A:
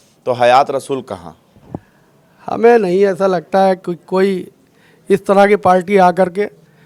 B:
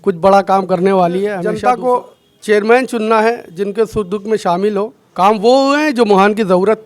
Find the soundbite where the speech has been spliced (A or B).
B